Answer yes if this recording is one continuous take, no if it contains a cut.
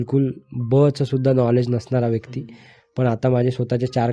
yes